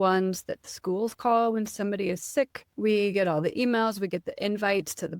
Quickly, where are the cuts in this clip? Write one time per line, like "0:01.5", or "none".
0:02.6

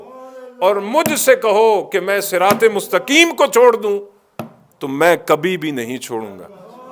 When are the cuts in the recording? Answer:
none

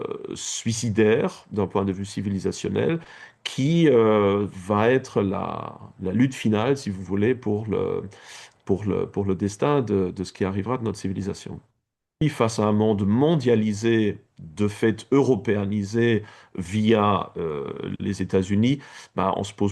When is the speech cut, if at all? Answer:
0:12.2

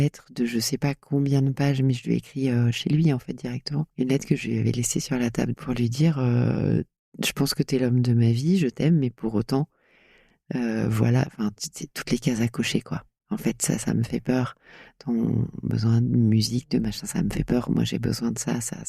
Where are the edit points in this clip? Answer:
0:03.9
0:05.5

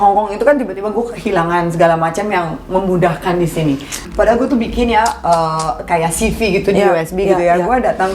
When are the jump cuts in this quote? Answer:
0:03.9

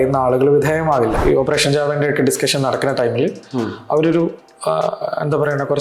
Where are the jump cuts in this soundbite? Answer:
0:01.2

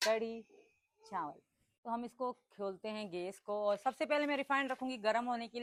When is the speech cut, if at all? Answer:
none

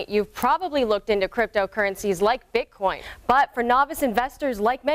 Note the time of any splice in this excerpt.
0:03.1

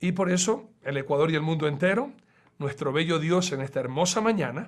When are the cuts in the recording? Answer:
0:01.3

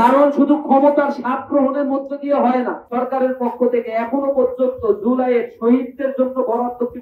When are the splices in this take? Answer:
0:02.8

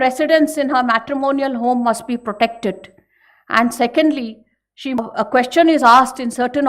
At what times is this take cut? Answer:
0:05.0

